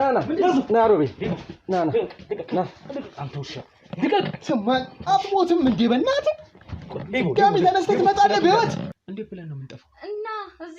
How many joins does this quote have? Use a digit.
1